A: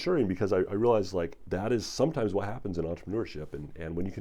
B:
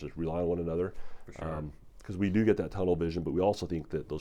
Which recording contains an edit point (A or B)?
A